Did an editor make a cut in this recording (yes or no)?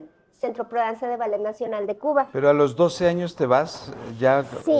yes